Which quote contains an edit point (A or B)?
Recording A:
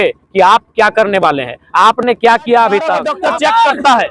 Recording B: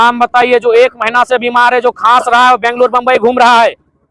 A